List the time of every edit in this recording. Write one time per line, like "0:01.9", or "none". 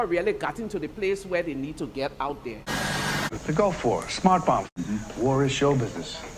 0:02.7
0:04.8